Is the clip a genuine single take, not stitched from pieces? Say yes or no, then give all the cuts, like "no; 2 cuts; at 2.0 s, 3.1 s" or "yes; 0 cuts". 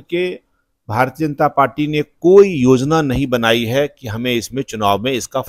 yes; 0 cuts